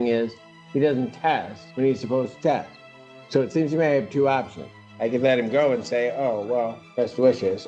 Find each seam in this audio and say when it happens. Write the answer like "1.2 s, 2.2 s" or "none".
1.6 s, 6.8 s

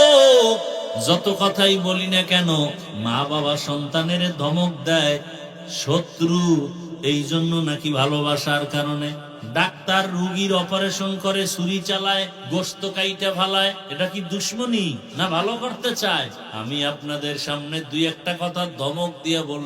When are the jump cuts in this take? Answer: 1.0 s, 2.9 s, 9.3 s, 12.4 s, 13.8 s, 15.1 s, 16.4 s

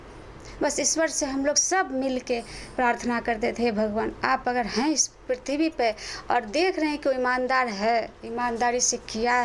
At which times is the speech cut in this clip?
none

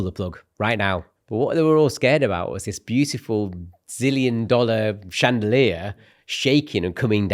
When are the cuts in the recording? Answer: 1.2 s

